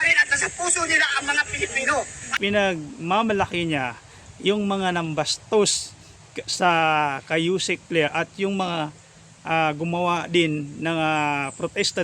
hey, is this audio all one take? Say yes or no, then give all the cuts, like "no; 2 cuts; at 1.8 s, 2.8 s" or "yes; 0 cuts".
no; 1 cut; at 2.2 s